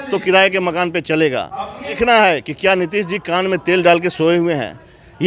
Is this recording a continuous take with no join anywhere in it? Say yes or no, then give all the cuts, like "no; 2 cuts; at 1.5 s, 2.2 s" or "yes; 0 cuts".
no; 1 cut; at 1.9 s